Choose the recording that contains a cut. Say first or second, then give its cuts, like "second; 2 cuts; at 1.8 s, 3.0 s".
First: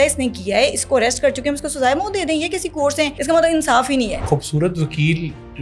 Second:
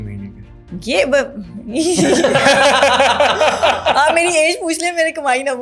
first; 2 cuts; at 3.2 s, 4.2 s